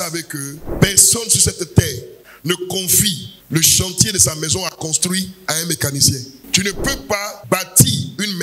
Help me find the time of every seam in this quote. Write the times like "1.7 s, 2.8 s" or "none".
none